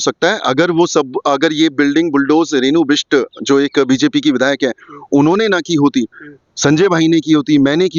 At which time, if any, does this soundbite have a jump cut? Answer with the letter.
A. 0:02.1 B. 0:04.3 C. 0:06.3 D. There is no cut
D